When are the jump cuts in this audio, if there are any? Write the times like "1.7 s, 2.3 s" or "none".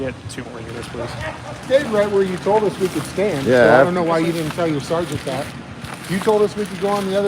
1.6 s